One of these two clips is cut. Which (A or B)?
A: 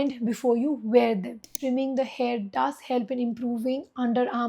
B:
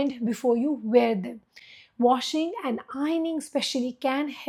A